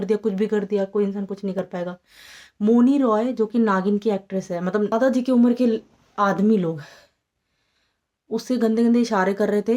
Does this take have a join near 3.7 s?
no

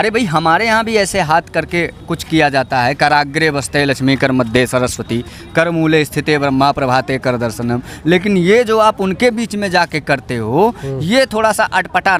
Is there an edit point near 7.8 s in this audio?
no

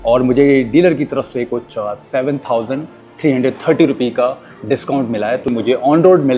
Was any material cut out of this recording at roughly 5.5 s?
yes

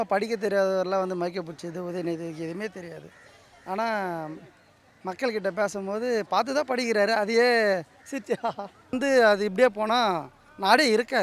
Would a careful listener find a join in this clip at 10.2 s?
no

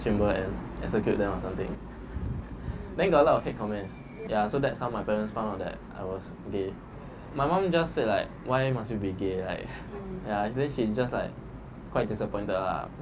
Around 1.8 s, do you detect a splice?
no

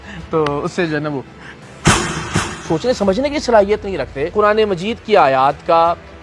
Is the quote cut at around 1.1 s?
no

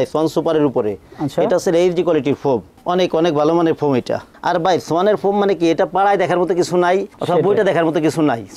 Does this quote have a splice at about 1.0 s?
no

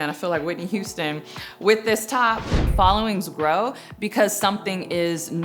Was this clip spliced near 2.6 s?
yes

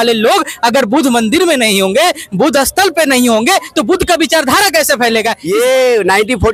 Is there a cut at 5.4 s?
yes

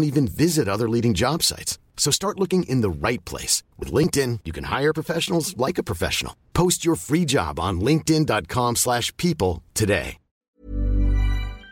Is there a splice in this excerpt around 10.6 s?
yes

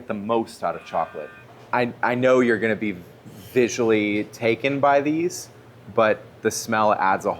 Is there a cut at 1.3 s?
yes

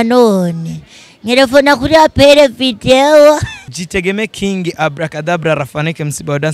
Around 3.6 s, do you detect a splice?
yes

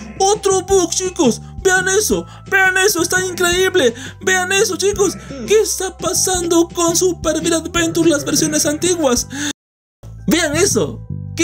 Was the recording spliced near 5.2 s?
no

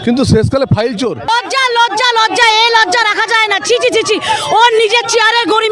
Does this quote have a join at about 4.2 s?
no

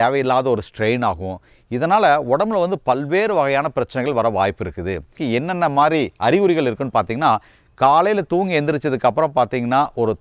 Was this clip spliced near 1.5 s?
no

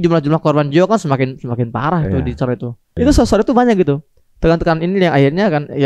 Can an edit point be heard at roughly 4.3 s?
no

